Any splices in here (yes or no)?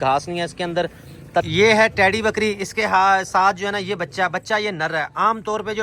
yes